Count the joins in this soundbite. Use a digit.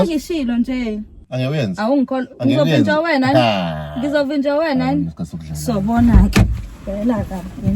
1